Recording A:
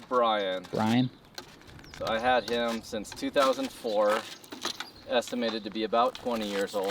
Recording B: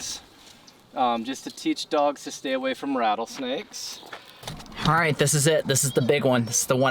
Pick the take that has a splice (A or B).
B